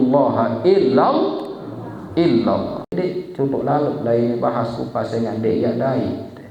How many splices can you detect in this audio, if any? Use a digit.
1